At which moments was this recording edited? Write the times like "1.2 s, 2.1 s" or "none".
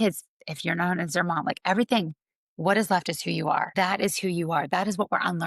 3.7 s